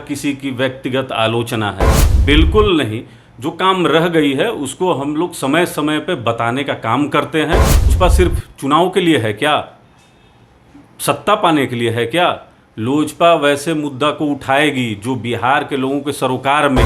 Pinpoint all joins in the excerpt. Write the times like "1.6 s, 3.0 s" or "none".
7.9 s